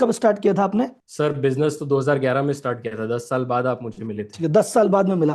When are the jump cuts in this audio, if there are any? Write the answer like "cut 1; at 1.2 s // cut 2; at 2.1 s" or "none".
none